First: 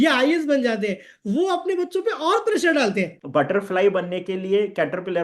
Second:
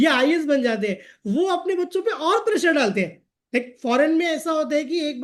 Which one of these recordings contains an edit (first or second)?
first